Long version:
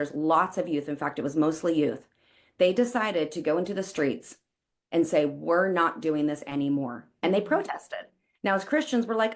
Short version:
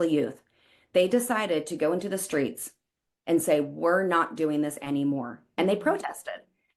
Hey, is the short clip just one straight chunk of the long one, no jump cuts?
yes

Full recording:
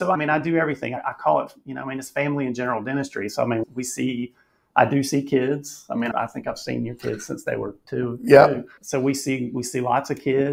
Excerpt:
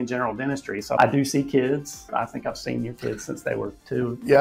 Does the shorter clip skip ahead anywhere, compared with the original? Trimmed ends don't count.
yes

